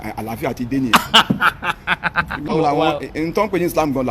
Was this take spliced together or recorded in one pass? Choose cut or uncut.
cut